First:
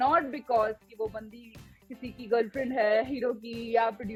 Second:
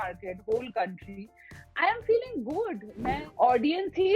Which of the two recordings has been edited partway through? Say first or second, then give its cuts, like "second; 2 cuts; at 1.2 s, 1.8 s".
second; 1 cut; at 3.2 s